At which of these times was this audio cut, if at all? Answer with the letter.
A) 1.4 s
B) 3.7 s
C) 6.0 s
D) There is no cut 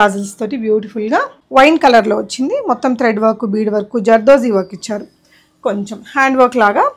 A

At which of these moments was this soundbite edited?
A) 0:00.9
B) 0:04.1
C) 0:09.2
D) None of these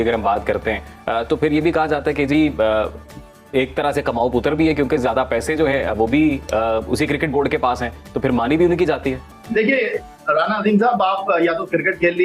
D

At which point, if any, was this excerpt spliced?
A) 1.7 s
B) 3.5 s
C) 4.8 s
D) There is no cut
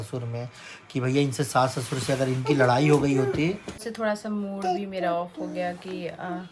B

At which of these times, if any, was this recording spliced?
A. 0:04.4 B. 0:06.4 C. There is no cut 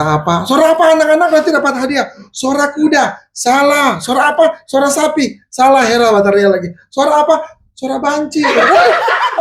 C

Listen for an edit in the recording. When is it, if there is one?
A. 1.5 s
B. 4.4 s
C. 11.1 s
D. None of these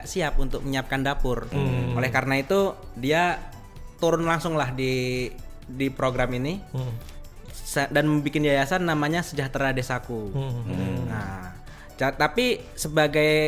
A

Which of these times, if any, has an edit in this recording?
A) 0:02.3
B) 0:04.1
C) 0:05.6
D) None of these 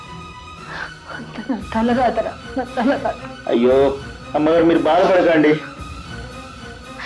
C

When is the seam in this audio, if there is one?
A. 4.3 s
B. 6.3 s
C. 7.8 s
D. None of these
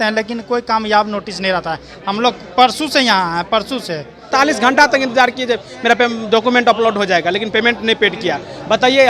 A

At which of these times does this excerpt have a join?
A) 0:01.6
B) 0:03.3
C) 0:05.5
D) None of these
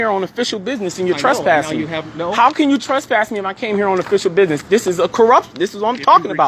D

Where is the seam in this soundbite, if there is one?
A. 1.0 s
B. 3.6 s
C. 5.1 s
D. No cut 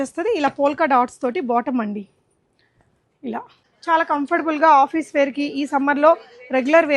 B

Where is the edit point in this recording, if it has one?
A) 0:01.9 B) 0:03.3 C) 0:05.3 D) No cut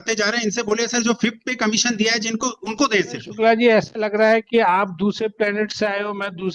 B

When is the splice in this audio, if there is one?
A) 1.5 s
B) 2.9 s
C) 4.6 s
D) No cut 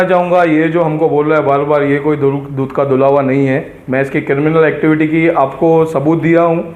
D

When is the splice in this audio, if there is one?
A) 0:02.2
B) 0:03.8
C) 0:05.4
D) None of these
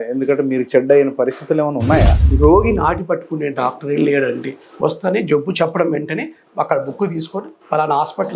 A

